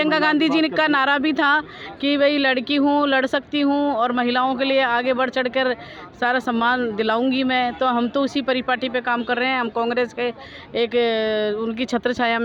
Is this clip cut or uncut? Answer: uncut